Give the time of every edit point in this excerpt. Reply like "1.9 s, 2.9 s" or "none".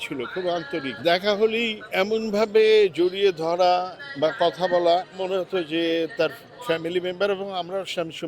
0.9 s, 1.9 s, 5.1 s